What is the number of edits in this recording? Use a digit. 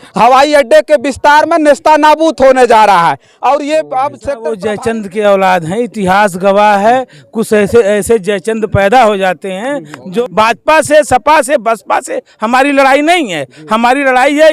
2